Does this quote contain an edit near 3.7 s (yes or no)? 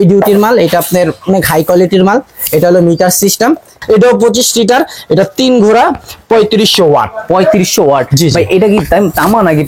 yes